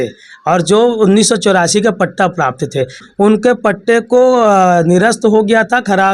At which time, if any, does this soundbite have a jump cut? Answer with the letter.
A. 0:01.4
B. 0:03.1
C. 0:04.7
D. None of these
B